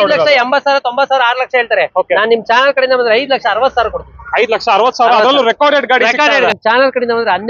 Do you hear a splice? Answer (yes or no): yes